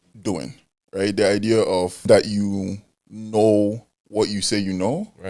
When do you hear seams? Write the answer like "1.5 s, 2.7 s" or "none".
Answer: 2.1 s